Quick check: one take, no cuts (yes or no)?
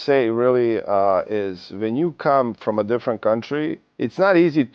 no